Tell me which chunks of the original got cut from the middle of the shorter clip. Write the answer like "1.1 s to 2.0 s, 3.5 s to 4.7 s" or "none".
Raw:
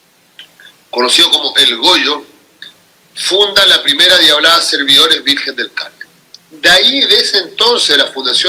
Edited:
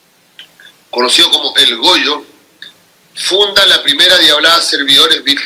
none

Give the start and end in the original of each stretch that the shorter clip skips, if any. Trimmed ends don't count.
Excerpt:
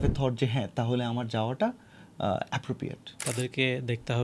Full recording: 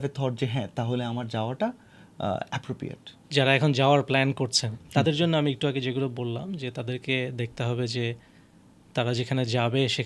3.2 s to 6.7 s

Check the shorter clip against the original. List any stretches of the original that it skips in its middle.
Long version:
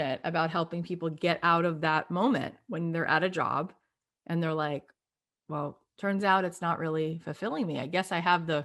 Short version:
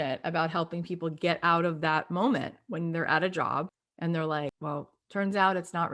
3.8 s to 4.1 s, 4.9 s to 5.5 s

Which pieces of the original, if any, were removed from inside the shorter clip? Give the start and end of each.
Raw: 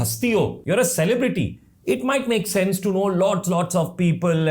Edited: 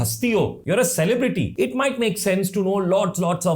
1.5 s to 1.8 s

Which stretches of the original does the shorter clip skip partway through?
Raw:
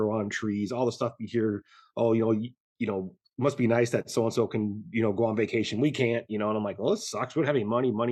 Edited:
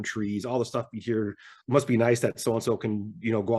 1.8 s to 3.2 s

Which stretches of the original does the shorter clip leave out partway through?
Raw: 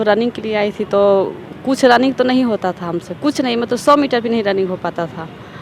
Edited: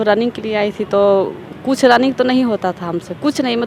none

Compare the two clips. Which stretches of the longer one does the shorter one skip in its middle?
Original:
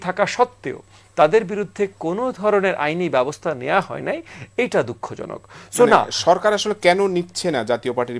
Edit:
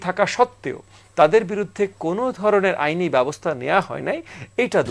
none

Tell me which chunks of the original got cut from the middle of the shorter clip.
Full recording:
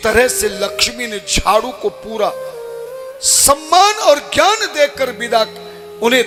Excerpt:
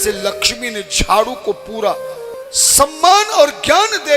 2.7 s to 3.0 s

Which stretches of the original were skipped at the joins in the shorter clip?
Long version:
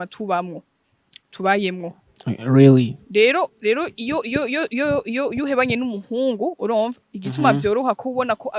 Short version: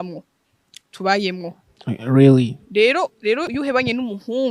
3.9 s to 5.3 s

